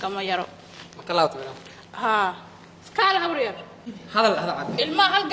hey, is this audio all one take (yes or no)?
no